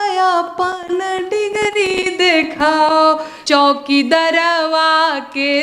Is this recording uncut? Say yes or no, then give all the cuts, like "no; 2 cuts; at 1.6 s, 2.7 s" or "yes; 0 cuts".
no; 1 cut; at 3.3 s